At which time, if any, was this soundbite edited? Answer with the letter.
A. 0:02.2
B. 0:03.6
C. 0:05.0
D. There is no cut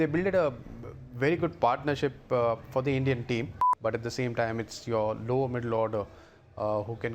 B